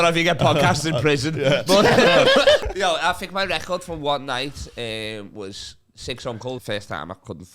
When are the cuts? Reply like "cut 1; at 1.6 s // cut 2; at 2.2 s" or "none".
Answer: cut 1; at 2.6 s // cut 2; at 6.6 s

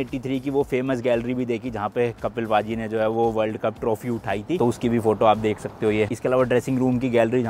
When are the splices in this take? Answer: none

